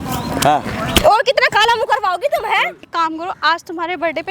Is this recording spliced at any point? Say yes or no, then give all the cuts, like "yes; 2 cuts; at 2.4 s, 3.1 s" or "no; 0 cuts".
yes; 1 cut; at 2.8 s